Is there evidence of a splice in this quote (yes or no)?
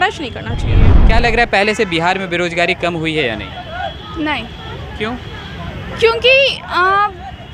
yes